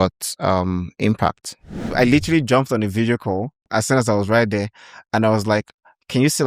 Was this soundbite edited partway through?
yes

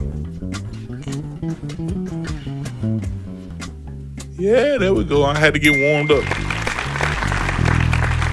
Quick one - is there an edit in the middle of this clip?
yes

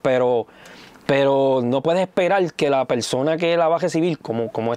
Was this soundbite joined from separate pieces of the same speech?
no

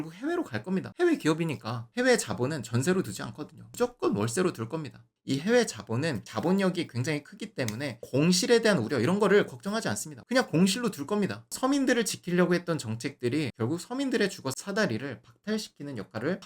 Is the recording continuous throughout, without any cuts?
no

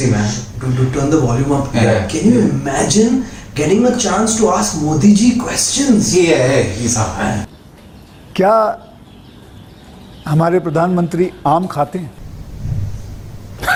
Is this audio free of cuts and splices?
yes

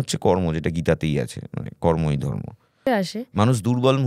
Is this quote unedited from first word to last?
no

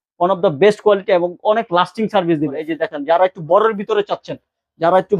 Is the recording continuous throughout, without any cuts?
no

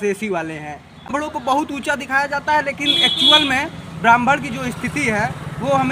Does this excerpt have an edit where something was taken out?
yes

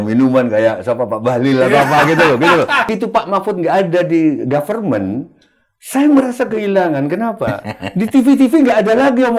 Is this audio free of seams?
no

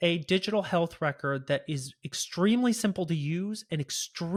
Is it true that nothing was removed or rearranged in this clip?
yes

